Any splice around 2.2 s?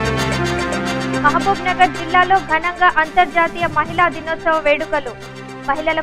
no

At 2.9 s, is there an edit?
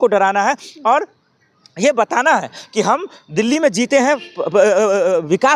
no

